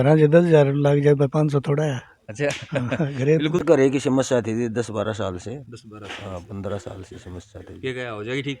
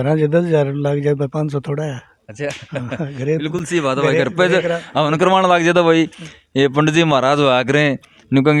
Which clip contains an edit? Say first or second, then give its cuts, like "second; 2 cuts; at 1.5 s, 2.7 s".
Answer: first; 1 cut; at 3.6 s